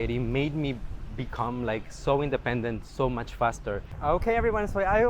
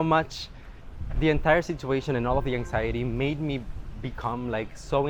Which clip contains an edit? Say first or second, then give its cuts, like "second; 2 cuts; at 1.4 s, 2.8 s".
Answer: first; 1 cut; at 3.9 s